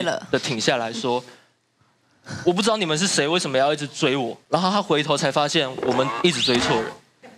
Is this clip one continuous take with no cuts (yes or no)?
yes